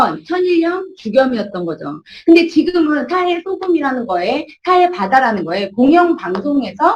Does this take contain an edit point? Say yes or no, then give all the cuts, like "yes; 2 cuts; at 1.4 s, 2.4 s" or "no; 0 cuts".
no; 0 cuts